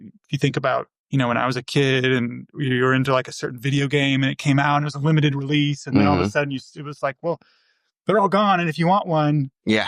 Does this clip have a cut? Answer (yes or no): yes